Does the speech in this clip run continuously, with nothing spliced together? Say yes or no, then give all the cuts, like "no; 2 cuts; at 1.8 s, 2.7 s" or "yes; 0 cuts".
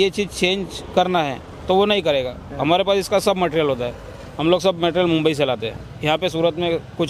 yes; 0 cuts